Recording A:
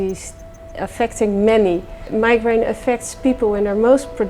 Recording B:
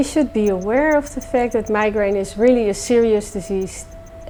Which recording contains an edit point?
A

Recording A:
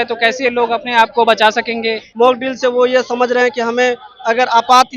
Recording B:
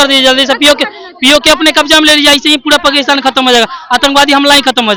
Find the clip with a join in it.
A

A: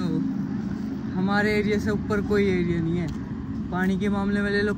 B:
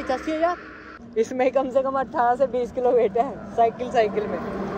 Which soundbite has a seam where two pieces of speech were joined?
B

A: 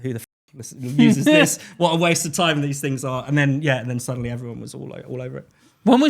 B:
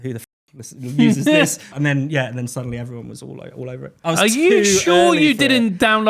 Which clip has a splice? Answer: B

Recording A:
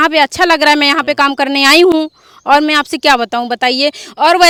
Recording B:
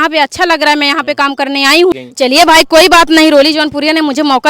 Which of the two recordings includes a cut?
B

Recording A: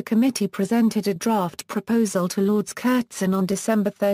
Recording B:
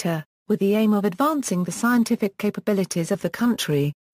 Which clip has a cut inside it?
B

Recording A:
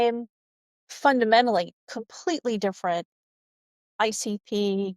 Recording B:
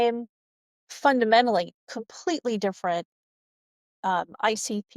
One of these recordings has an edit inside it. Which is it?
A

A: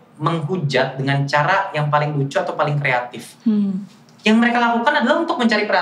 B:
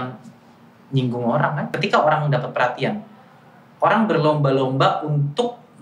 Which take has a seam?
B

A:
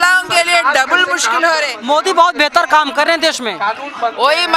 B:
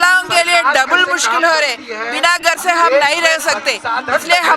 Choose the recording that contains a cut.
A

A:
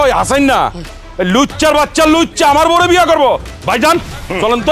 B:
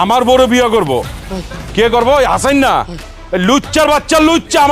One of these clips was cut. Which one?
B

